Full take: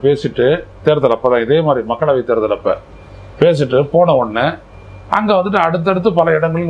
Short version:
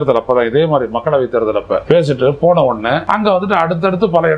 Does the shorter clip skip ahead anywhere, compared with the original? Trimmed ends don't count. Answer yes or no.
yes